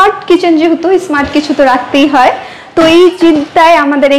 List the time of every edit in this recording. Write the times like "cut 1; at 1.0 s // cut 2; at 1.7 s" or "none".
none